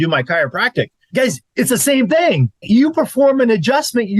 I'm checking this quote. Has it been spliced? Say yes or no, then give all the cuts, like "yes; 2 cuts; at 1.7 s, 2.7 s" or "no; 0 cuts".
yes; 2 cuts; at 1.1 s, 2.6 s